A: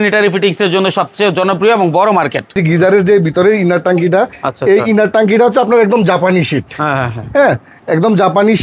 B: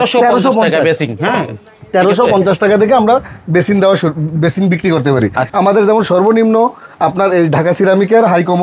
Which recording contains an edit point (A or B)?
A